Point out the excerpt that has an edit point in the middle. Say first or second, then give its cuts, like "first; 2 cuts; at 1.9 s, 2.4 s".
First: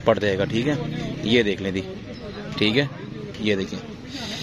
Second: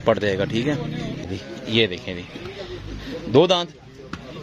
second; 1 cut; at 1.2 s